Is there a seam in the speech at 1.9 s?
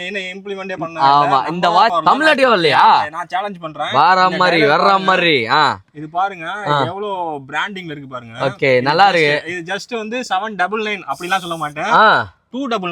no; 0 cuts

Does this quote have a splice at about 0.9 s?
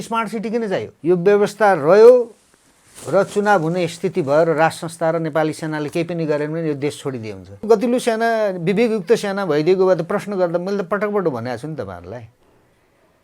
yes; 2 cuts; at 0.9 s, 7.6 s

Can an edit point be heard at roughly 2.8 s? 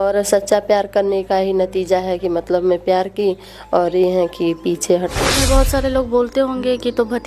no; 1 cut; at 5.2 s

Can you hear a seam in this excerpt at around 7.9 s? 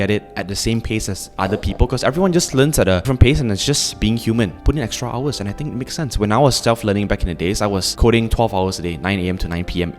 yes; 3 cuts; at 3.1 s, 4.6 s, 7.9 s

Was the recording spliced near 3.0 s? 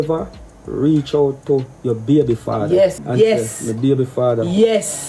yes; 1 cut; at 3.0 s

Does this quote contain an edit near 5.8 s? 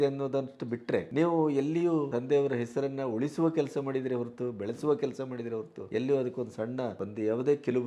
yes; 4 cuts; at 1.1 s, 2.1 s, 5.8 s, 7.0 s

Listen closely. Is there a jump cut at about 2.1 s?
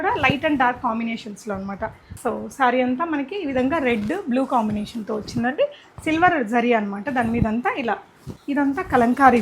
yes; 2 cuts; at 2.1 s, 8.3 s

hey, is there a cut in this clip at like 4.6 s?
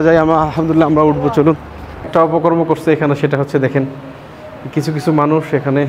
no; 1 cut; at 2.1 s

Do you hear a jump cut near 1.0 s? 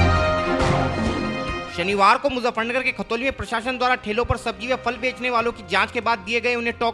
yes; 1 cut; at 1.0 s

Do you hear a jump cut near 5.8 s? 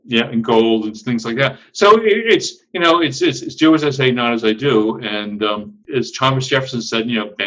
yes; 1 cut; at 5.8 s

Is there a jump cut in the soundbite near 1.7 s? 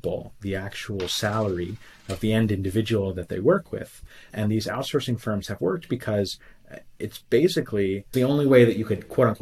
no; 2 cuts; at 4.3 s, 8.1 s

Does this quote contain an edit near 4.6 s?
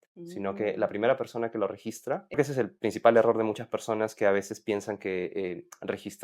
no; 1 cut; at 2.4 s

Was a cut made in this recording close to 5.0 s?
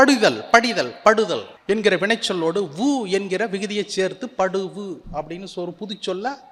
no; 0 cuts

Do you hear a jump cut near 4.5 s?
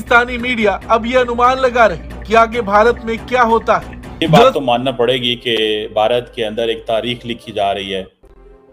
yes; 1 cut; at 4.5 s

